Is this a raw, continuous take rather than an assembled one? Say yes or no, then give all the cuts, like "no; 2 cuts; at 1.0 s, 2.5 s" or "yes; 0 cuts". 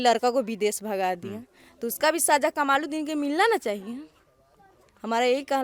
yes; 0 cuts